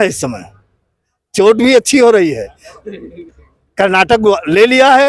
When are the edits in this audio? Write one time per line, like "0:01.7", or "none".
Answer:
none